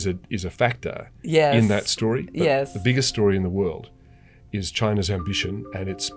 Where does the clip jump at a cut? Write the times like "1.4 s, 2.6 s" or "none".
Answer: none